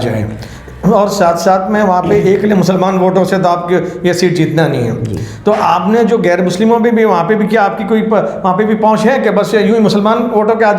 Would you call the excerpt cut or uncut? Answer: uncut